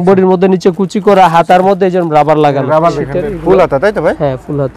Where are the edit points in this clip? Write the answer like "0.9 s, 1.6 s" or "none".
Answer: 2.9 s